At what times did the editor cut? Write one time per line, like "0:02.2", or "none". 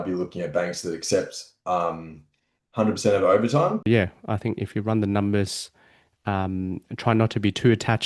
0:03.9